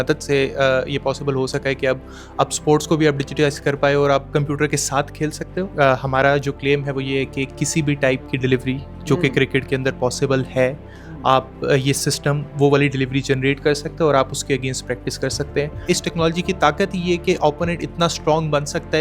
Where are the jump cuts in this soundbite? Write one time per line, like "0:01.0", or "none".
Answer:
0:05.7
0:15.8